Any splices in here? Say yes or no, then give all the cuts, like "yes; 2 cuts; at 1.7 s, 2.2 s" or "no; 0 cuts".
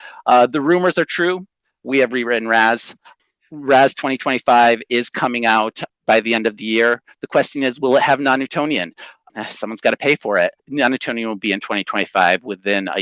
yes; 4 cuts; at 3.1 s, 5.8 s, 9.2 s, 10.6 s